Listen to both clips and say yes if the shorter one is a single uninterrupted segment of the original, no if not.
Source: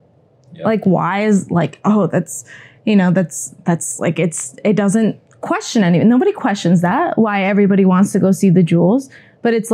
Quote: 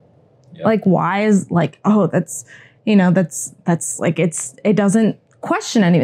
yes